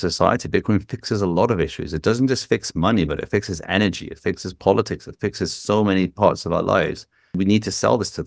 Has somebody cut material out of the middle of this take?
yes; 1 cut; at 7.4 s

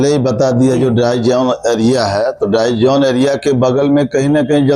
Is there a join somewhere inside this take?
no; 0 cuts

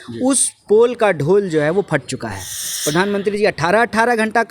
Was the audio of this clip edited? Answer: yes; 1 cut; at 2.6 s

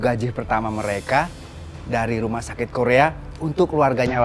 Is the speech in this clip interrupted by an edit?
no; 0 cuts

